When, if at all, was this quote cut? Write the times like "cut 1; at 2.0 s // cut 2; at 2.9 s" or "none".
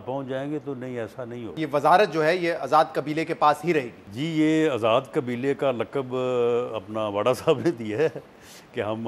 cut 1; at 1.5 s // cut 2; at 4.0 s